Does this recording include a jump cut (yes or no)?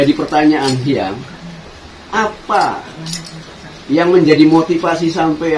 no